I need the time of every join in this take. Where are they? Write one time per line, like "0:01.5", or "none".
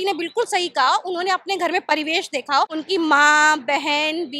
0:02.7